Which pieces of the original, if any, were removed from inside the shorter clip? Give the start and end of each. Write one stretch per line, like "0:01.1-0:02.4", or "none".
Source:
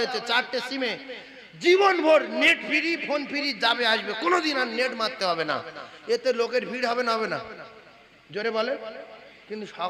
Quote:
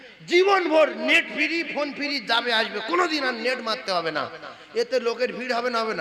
none